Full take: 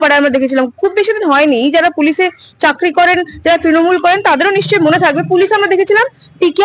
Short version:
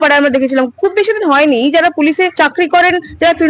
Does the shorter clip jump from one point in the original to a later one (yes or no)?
yes